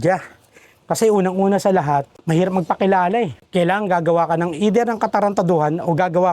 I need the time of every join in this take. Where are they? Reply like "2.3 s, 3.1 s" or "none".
none